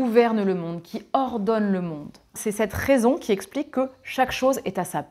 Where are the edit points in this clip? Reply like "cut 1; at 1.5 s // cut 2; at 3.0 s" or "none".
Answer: cut 1; at 2.4 s